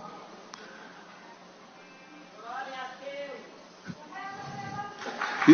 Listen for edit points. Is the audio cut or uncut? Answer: uncut